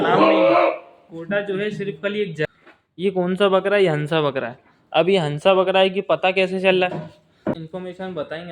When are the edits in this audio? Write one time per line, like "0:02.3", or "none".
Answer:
0:02.5
0:07.6